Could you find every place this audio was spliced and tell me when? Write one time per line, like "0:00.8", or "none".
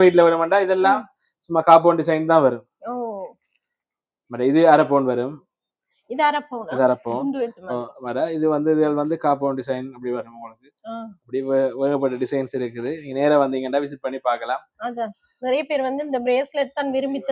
none